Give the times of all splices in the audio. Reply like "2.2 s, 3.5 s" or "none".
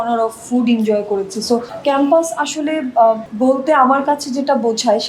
1.7 s, 3.3 s

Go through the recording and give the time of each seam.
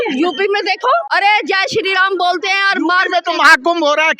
1.1 s

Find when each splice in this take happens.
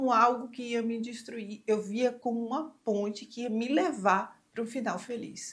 none

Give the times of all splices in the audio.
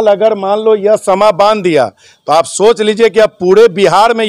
none

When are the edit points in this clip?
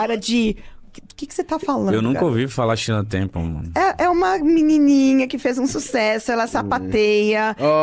none

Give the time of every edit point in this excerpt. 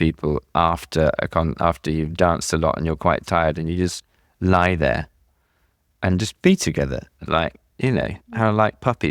none

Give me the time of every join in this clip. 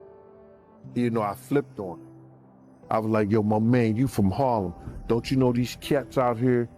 1.0 s

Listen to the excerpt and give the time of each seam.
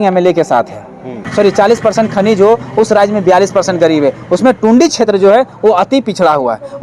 1.2 s

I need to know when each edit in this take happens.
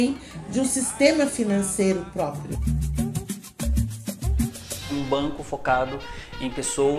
2.5 s, 4.9 s

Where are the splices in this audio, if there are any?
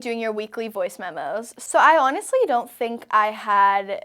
1.5 s

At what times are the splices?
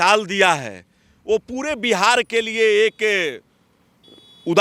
none

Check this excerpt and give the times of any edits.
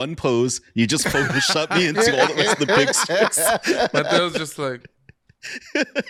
none

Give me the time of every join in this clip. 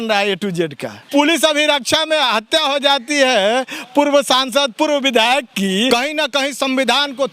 1.1 s, 5.9 s

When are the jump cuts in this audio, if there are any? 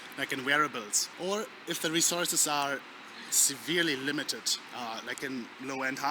1.0 s

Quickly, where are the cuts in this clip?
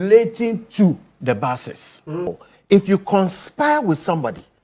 2.5 s

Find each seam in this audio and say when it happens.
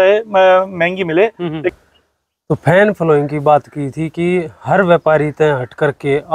1.7 s

